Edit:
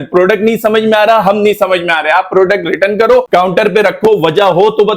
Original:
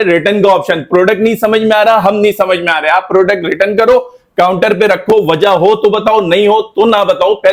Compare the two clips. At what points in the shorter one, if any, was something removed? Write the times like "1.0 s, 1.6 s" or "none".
3.3 s